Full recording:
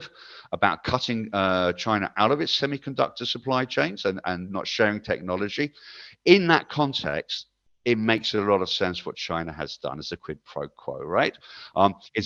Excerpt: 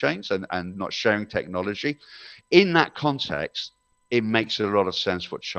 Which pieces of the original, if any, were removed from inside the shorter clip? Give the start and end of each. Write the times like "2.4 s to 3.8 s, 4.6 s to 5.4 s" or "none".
none